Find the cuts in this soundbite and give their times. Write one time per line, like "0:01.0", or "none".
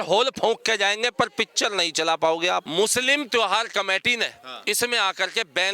0:02.7